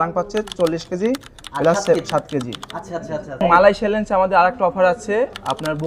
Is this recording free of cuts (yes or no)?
no